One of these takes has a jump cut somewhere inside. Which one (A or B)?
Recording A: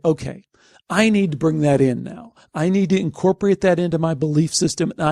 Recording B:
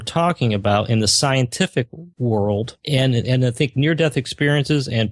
B